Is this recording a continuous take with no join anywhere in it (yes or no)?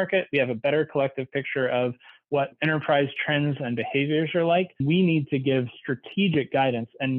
no